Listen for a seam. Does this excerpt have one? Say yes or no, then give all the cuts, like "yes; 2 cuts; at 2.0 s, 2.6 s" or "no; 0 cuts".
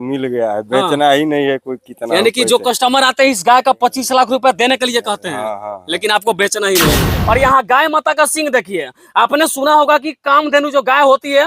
yes; 1 cut; at 7.1 s